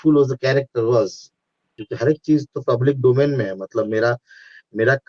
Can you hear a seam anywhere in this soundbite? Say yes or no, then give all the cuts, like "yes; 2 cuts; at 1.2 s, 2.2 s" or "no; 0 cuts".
yes; 1 cut; at 1.8 s